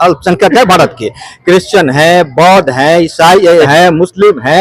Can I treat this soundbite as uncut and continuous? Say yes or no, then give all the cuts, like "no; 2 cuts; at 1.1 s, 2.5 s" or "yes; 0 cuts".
no; 1 cut; at 3.6 s